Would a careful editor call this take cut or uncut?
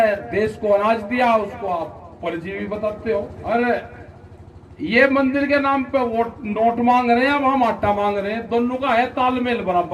cut